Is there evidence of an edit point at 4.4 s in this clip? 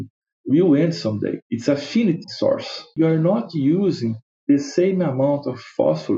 no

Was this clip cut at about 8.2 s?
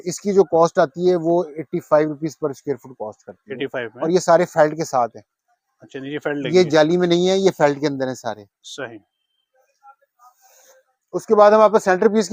no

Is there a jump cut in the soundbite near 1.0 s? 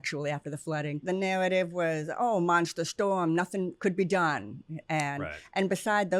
yes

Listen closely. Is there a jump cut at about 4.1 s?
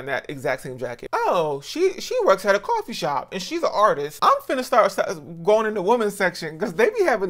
yes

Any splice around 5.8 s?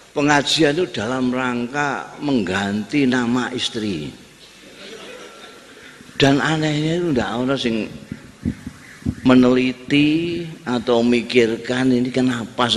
yes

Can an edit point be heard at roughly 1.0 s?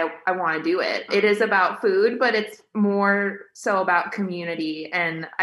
yes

